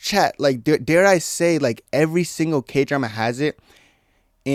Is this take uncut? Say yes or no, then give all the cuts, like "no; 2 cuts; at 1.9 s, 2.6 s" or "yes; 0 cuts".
yes; 0 cuts